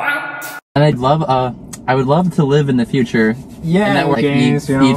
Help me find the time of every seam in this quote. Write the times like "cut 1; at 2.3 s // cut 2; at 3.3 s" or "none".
cut 1; at 0.9 s